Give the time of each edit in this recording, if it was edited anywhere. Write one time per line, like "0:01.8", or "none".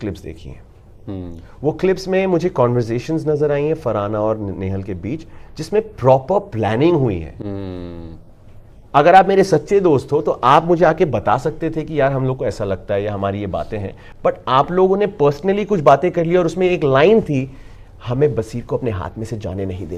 none